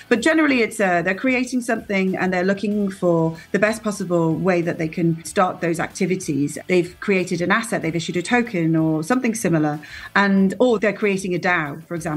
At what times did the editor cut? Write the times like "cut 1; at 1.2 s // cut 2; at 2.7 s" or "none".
cut 1; at 5.3 s // cut 2; at 6.6 s // cut 3; at 10.8 s